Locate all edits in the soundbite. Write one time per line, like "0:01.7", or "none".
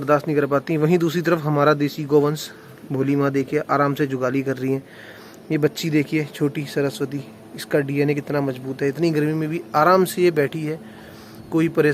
none